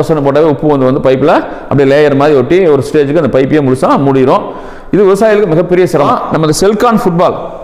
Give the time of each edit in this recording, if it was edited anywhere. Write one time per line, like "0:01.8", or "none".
0:06.2